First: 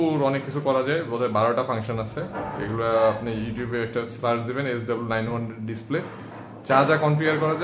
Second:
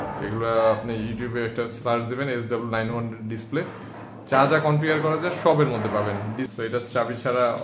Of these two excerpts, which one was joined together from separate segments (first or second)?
second